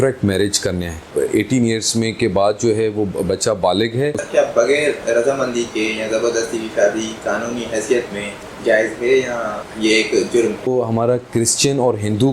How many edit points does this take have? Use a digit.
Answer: 5